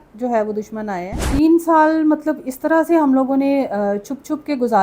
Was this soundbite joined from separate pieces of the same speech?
yes; 1 cut; at 1.3 s

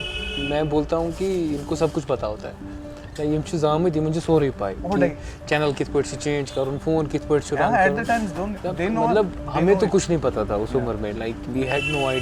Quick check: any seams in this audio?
no; 0 cuts

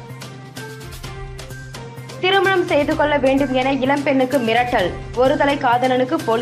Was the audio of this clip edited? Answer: yes; 1 cut; at 1.6 s

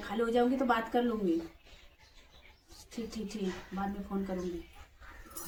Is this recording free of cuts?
yes; 0 cuts

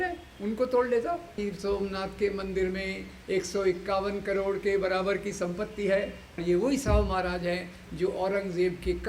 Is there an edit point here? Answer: yes; 2 cuts; at 1.4 s, 6.3 s

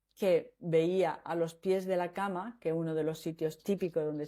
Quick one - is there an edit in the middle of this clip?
no; 0 cuts

